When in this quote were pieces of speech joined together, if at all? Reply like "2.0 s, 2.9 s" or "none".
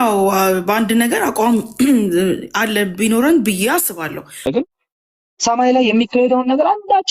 4.5 s